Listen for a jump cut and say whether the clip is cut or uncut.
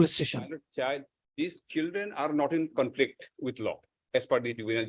uncut